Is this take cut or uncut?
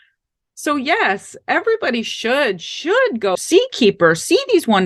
cut